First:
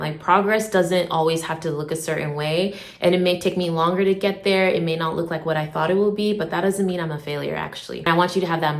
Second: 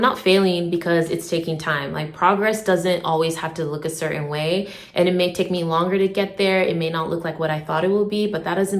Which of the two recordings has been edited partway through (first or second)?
first